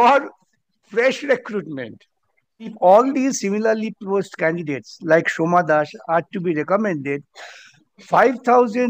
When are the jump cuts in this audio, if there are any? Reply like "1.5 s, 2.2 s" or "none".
2.7 s